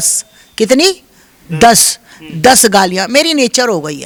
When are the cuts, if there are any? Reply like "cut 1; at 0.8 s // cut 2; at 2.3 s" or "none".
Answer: none